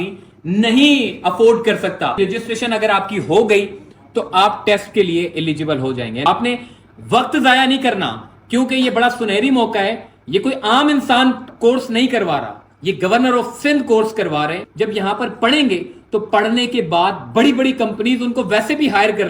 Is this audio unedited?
no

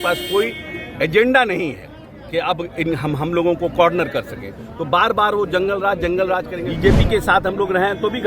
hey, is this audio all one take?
no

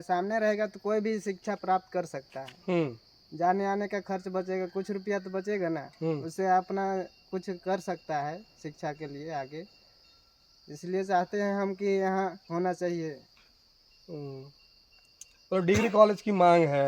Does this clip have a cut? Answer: no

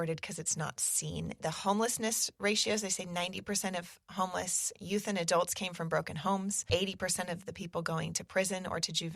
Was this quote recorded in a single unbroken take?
no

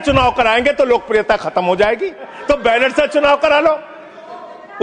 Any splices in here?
yes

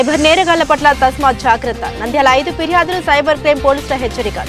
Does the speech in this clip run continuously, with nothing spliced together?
yes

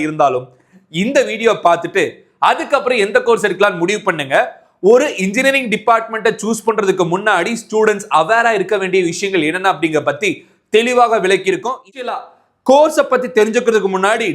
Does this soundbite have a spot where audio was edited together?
yes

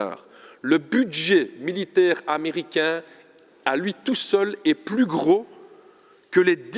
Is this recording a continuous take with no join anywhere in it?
yes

